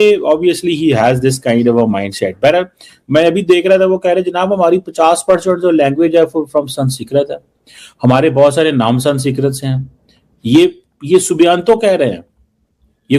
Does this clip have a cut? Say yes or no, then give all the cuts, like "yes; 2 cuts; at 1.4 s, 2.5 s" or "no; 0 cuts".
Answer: no; 0 cuts